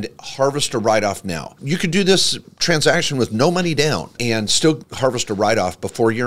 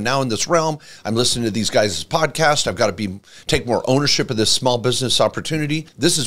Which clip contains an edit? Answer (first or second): first